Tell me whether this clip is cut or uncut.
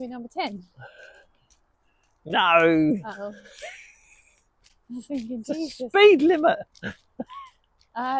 uncut